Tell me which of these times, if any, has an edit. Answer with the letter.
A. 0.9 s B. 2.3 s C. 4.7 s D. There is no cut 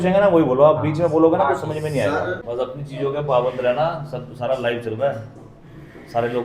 B